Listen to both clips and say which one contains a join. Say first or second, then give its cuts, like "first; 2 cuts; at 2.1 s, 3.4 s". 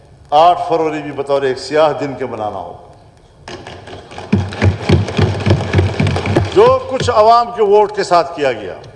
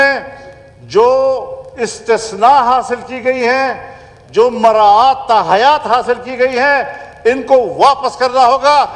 first; 1 cut; at 6.3 s